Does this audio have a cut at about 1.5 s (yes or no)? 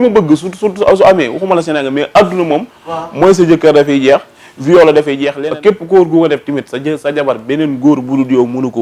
no